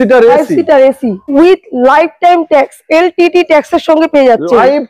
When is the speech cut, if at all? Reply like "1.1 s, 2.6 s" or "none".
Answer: 1.3 s